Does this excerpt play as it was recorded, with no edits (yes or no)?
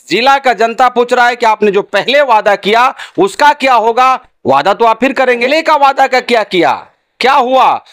no